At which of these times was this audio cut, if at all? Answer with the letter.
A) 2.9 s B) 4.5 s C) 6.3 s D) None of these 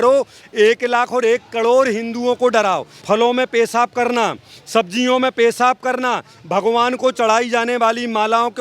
A